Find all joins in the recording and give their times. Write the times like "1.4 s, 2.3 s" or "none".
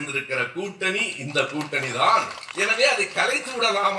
2.4 s